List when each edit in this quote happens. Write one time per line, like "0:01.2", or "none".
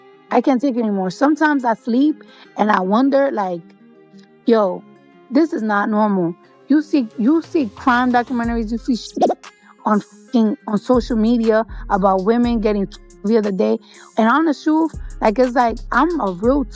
none